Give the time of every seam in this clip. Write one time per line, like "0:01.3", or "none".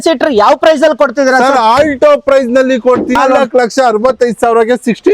0:03.1